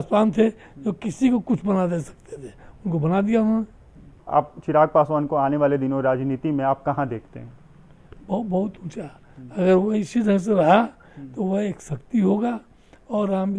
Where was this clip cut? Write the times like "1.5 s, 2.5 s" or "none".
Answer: 4.2 s

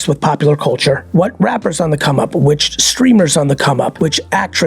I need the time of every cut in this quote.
1.0 s, 3.9 s

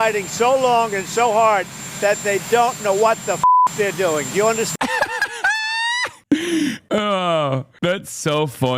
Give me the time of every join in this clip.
6.8 s

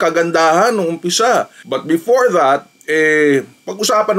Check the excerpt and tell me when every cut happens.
1.6 s

